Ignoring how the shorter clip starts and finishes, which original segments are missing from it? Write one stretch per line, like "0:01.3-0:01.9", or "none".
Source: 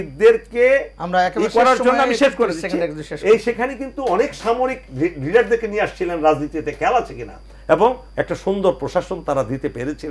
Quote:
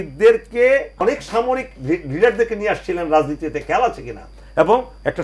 0:01.0-0:04.1